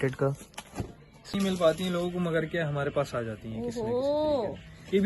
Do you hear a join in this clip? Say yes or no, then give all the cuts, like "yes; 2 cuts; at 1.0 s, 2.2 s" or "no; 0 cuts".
yes; 1 cut; at 1.3 s